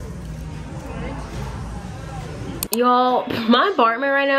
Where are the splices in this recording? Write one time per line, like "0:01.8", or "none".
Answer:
none